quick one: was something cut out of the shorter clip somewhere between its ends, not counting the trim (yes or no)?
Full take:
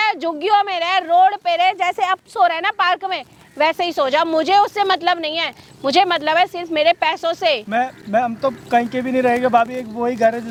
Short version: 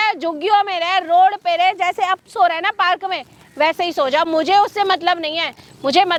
no